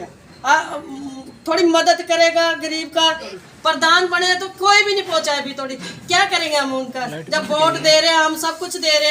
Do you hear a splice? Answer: yes; 1 cut; at 3.3 s

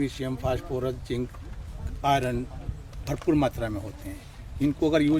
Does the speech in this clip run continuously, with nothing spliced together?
yes; 0 cuts

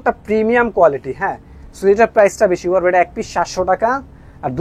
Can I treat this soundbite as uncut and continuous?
yes; 0 cuts

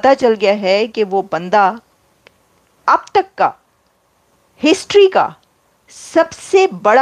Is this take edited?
no; 0 cuts

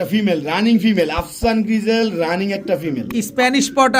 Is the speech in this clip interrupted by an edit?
no; 0 cuts

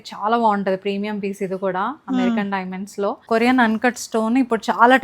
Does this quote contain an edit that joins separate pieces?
yes; 1 cut; at 3.3 s

